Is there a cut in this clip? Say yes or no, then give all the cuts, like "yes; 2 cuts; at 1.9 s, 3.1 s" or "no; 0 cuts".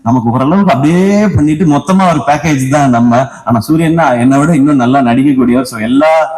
no; 0 cuts